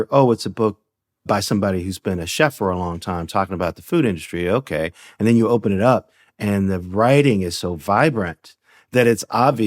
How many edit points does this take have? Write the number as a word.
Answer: one